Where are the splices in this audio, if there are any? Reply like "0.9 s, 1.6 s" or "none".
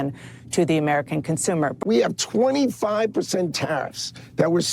1.7 s